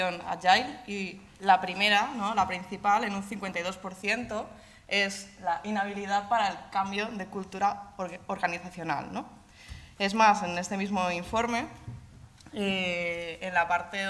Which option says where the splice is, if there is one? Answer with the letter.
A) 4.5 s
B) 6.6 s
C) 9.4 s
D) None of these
B